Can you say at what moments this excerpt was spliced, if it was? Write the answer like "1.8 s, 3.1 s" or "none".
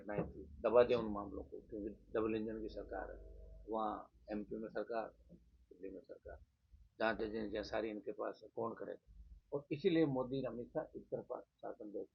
9.3 s